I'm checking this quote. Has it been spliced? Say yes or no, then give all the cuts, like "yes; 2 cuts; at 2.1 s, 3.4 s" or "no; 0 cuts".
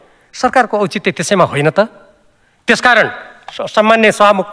no; 0 cuts